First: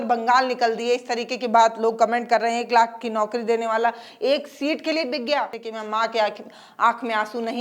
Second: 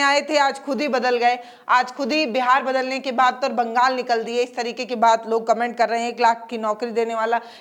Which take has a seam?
first; 1 cut; at 5.6 s

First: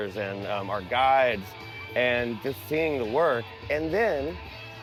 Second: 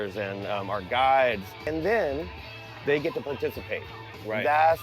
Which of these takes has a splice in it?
second; 1 cut; at 1.7 s

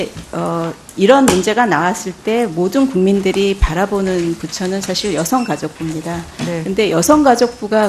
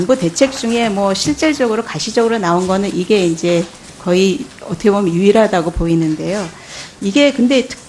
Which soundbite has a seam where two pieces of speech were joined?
second; 1 cut; at 2.2 s

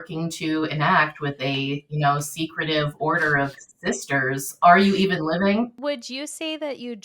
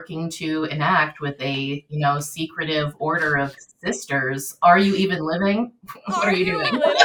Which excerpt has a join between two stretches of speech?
first; 1 cut; at 5.8 s

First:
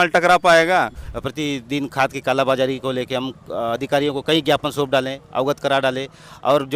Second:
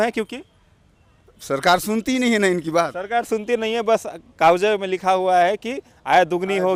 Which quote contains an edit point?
first; 1 cut; at 1.0 s

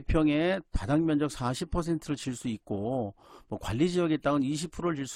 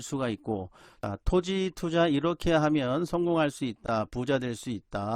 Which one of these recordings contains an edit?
second; 1 cut; at 1.0 s

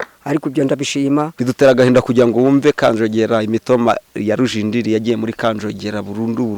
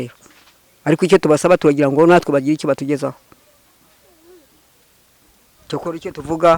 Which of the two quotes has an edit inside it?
first; 1 cut; at 1.3 s

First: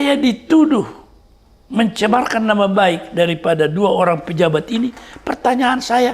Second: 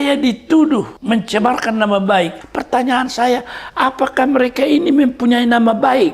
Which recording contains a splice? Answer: second; 2 cuts; at 0.9 s, 2.4 s

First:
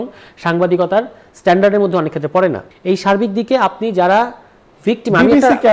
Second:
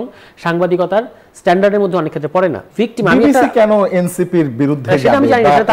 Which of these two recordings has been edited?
second; 1 cut; at 2.6 s

